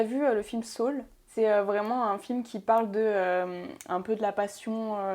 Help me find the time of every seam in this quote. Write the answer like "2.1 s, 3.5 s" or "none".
1.3 s

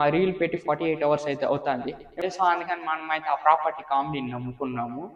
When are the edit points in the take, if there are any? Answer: 2.2 s

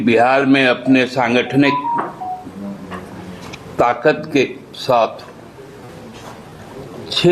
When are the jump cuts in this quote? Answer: none

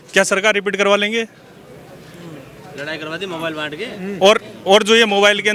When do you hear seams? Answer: none

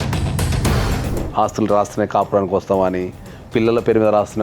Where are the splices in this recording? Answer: 1.0 s

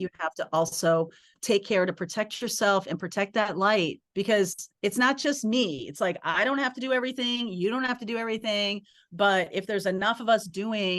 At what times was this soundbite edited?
1.2 s, 4.0 s, 4.6 s

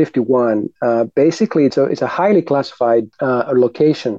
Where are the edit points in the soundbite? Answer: 1.7 s, 3.1 s

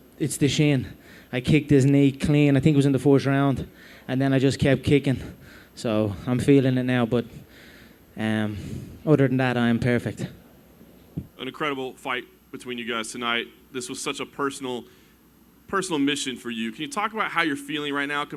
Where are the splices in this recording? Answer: none

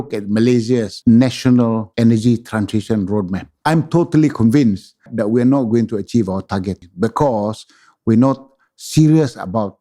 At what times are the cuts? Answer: 0.9 s, 1.9 s, 3.4 s, 5.1 s, 6.8 s

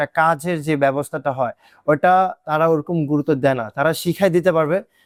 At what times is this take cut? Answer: none

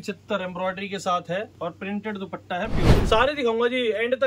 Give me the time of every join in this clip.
1.5 s, 3.0 s

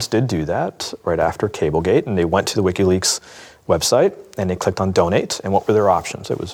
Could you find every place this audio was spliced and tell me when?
none

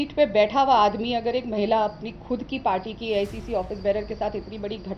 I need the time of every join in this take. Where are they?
none

